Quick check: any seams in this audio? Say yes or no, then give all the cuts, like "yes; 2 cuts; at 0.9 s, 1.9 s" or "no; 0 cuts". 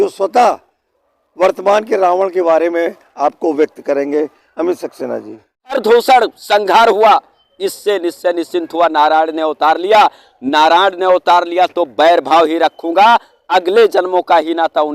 yes; 1 cut; at 5.7 s